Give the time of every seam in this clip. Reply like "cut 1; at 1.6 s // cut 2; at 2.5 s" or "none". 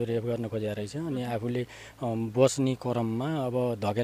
none

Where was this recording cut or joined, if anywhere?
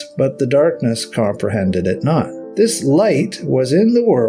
cut 1; at 2.4 s

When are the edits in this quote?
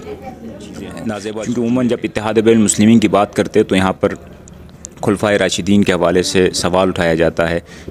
cut 1; at 1.2 s

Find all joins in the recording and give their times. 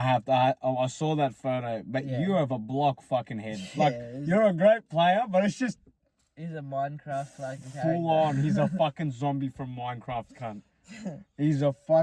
none

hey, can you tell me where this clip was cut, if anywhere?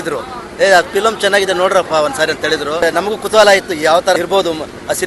cut 1; at 2.8 s // cut 2; at 4.2 s

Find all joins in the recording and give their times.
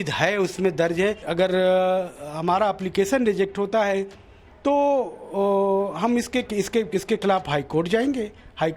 cut 1; at 1.2 s

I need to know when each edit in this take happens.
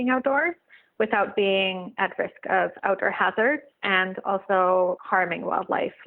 cut 1; at 3.7 s // cut 2; at 5.0 s

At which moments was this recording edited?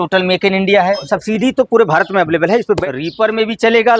cut 1; at 1.1 s // cut 2; at 2.8 s

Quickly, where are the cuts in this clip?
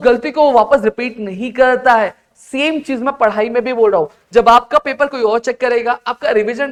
none

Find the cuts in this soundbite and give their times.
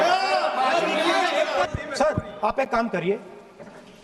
cut 1; at 1.7 s

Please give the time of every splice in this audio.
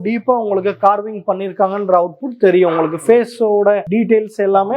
none

